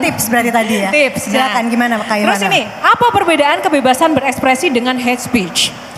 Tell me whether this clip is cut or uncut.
uncut